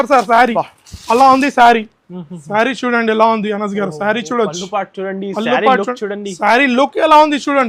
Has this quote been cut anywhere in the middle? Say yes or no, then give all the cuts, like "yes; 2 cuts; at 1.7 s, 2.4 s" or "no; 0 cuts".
no; 0 cuts